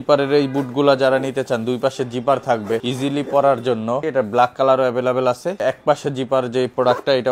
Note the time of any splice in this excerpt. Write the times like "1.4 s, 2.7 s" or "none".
2.9 s, 4.0 s, 5.6 s